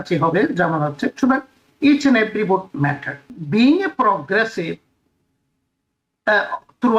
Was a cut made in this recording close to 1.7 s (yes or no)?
no